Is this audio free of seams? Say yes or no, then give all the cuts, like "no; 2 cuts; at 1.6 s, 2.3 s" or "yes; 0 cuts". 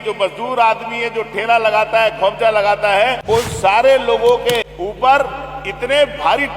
no; 2 cuts; at 3.2 s, 4.7 s